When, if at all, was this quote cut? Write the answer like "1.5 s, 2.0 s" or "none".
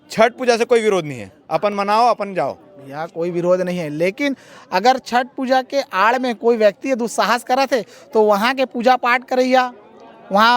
none